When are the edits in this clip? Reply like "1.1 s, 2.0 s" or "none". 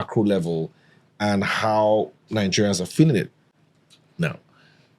none